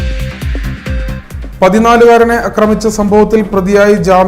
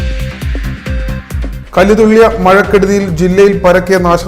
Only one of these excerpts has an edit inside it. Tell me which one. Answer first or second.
second